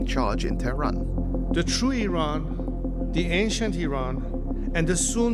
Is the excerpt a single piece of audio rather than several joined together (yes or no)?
yes